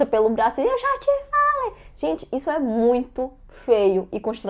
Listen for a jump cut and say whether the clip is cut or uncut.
uncut